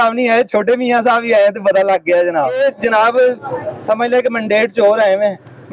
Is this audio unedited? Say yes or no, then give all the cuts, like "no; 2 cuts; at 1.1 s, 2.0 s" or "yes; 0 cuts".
no; 1 cut; at 2.6 s